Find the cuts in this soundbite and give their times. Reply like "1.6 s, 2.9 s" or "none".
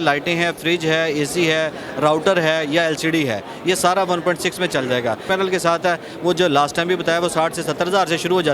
5.2 s